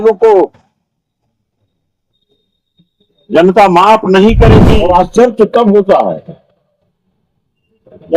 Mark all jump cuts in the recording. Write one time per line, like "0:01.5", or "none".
0:04.6